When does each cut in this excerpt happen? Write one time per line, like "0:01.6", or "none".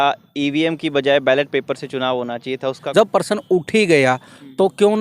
0:02.8